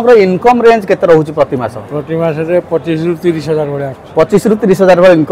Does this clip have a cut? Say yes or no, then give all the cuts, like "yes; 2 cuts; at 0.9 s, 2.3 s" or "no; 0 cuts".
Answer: no; 0 cuts